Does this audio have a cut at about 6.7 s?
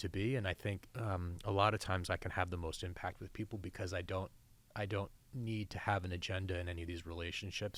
no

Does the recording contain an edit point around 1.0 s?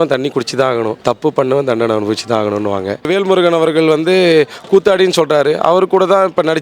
yes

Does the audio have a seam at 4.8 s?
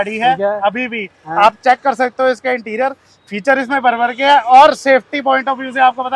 no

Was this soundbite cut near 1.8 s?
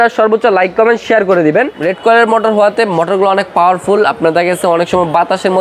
yes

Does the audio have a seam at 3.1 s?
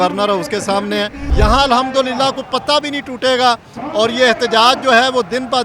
no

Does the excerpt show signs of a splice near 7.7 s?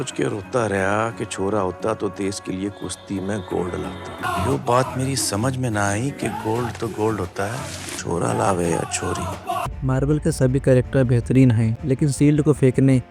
no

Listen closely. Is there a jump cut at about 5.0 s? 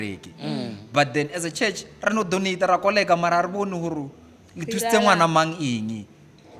no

